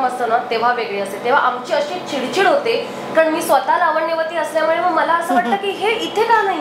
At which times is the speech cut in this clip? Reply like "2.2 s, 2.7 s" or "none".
none